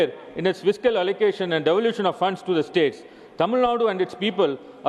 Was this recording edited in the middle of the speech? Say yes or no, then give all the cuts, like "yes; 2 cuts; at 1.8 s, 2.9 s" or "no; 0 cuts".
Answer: no; 0 cuts